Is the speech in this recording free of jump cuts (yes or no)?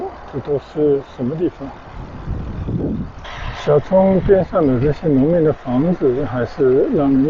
no